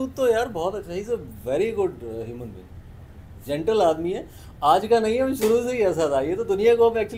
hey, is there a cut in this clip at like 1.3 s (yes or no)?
no